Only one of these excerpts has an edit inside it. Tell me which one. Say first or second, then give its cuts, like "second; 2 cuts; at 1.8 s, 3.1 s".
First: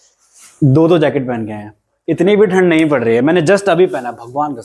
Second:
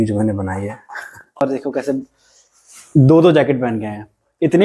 second; 1 cut; at 1.4 s